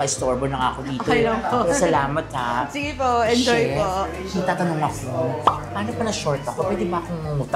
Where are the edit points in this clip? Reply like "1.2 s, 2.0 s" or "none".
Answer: none